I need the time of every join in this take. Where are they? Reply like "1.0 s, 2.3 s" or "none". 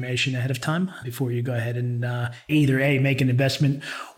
1.0 s, 2.5 s